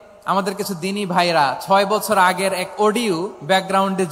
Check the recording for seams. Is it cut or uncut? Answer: uncut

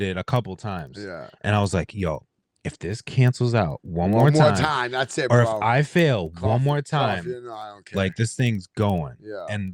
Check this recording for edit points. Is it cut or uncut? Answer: uncut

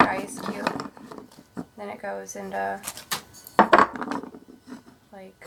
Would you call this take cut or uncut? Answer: uncut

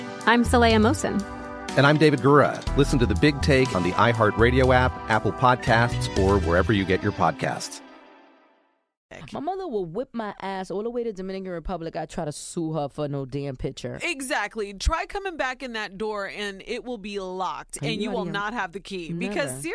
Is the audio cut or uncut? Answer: cut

